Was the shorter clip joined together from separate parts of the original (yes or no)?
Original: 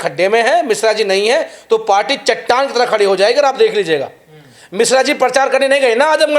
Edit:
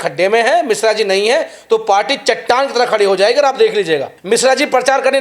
yes